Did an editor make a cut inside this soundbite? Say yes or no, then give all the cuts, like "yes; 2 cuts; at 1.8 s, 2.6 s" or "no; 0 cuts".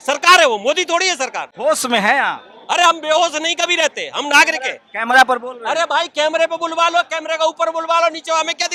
no; 0 cuts